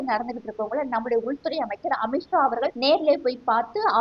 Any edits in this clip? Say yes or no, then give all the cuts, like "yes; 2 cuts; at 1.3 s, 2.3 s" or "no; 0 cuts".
yes; 1 cut; at 2.8 s